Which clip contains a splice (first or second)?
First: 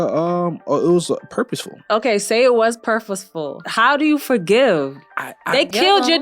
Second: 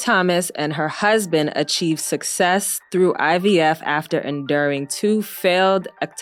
first